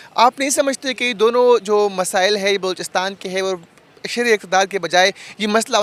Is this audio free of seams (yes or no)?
yes